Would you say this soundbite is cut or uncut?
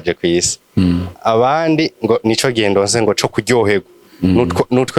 uncut